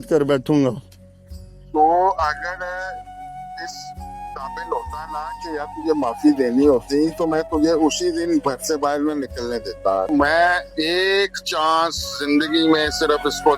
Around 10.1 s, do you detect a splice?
yes; 1 cut; at 10.1 s

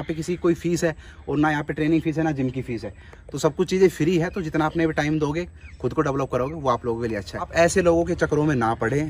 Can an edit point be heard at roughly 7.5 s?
yes; 1 cut; at 7.5 s

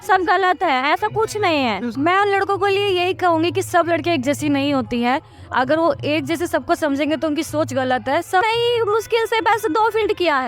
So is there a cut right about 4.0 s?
no; 2 cuts; at 1.9 s, 8.4 s

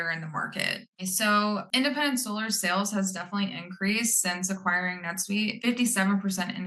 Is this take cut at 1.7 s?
yes; 3 cuts; at 0.9 s, 1.7 s, 5.6 s

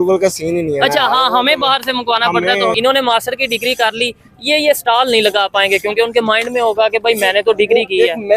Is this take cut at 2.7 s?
yes; 1 cut; at 2.7 s

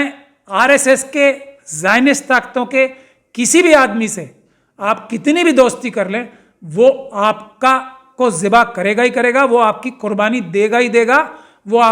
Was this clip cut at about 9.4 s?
no; 0 cuts

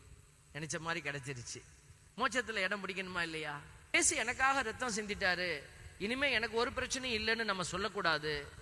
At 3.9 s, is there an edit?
yes; 1 cut; at 3.9 s

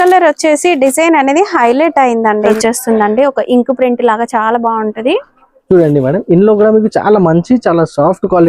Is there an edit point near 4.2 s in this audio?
no; 1 cut; at 2.6 s

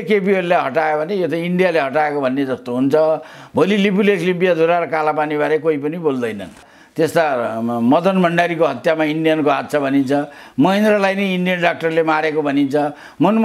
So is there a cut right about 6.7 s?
yes; 1 cut; at 6.7 s

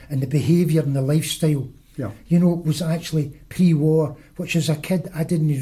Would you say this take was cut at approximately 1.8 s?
no; 0 cuts

